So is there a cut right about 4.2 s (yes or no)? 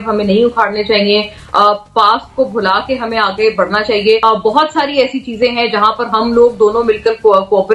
yes